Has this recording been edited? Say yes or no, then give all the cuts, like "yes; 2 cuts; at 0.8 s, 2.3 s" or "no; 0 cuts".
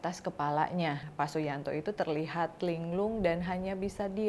yes; 1 cut; at 1.1 s